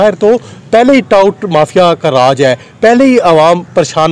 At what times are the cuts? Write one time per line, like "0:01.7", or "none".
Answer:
none